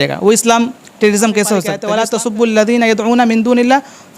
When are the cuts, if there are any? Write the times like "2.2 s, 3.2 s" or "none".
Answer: 1.8 s